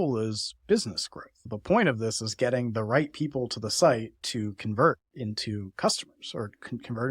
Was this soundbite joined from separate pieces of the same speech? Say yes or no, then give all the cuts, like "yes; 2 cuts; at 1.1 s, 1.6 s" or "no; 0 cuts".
yes; 2 cuts; at 1.4 s, 4.2 s